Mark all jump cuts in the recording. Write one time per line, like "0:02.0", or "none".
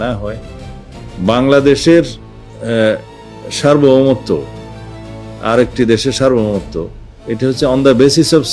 0:00.9